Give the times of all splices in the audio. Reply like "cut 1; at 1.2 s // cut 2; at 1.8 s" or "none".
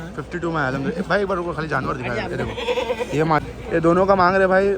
cut 1; at 3.4 s